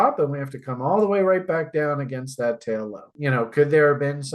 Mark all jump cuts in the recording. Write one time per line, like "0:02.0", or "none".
0:03.1